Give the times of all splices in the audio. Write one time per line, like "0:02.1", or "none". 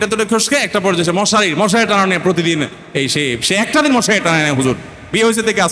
none